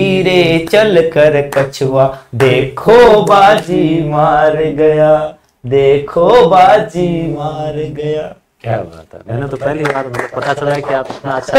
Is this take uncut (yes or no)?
yes